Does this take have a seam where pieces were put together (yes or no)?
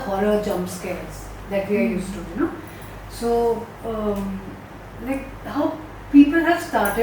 no